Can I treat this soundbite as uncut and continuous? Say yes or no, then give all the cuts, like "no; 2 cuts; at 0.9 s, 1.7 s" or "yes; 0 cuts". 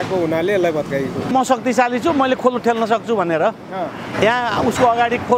no; 1 cut; at 1.3 s